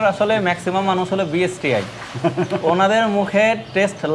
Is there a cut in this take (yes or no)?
no